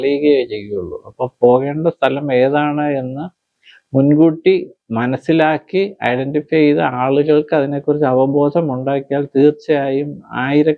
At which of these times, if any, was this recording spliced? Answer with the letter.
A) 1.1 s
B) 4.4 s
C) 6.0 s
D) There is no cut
D